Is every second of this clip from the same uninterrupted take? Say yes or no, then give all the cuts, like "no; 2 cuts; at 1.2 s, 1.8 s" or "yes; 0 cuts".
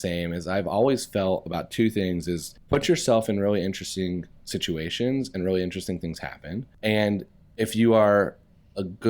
no; 2 cuts; at 2.5 s, 6.7 s